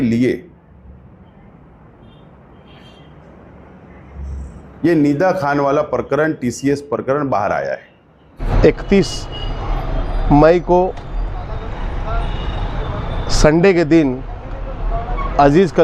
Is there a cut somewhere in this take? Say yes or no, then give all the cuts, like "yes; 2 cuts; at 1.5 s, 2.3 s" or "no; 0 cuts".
yes; 1 cut; at 8.4 s